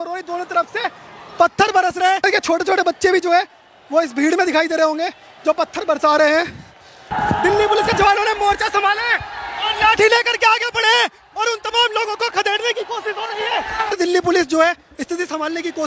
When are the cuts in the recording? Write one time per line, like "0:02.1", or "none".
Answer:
0:02.2
0:07.1
0:13.9